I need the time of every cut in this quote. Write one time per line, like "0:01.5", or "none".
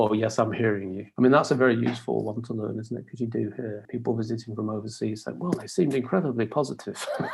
0:01.0
0:03.8